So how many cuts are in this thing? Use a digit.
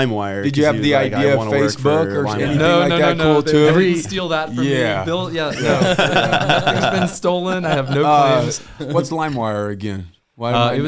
0